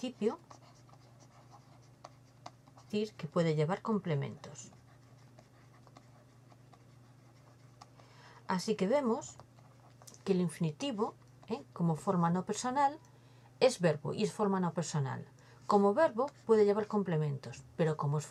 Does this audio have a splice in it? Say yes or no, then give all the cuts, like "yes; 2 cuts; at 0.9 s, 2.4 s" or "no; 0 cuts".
no; 0 cuts